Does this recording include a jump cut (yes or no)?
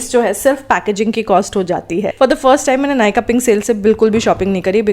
yes